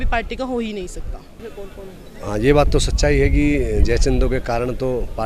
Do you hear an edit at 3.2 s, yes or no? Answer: no